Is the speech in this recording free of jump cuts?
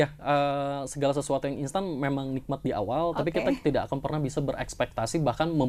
yes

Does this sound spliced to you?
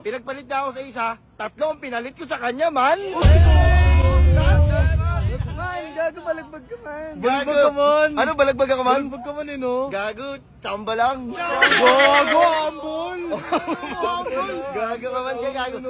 no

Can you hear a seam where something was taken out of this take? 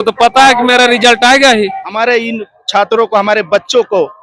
yes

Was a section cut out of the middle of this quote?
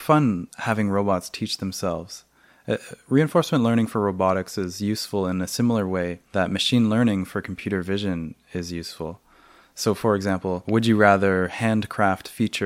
no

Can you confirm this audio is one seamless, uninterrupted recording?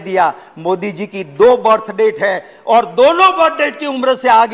yes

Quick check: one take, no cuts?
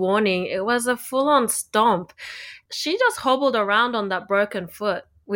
no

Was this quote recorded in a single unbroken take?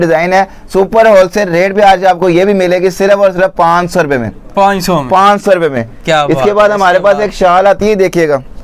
yes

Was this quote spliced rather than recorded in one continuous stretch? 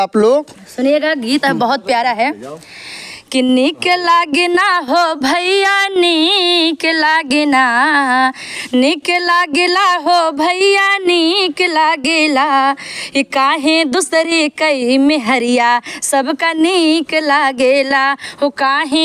no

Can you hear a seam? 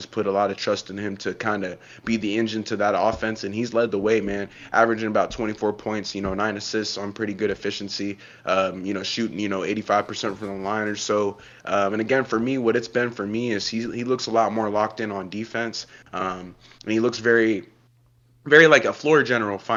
no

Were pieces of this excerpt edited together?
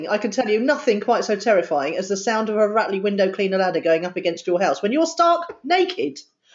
no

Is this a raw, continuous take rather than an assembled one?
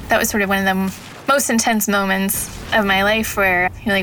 yes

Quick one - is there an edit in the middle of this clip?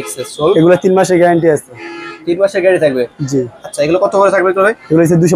no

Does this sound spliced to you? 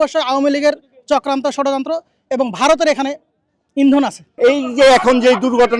yes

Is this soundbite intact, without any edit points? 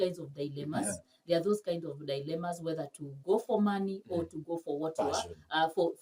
yes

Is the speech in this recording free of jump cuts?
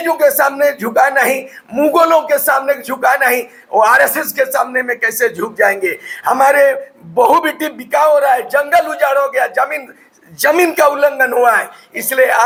yes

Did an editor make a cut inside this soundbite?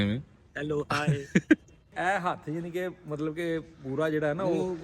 yes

